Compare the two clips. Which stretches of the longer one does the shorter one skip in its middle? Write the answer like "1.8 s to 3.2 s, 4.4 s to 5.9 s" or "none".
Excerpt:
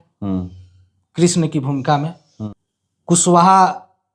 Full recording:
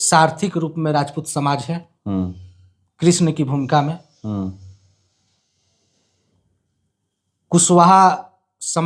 4.2 s to 6.7 s